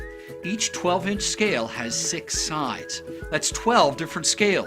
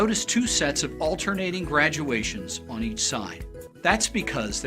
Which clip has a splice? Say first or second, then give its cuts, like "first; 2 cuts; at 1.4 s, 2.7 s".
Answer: second; 1 cut; at 3.7 s